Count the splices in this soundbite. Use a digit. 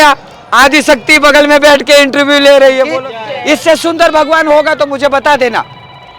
1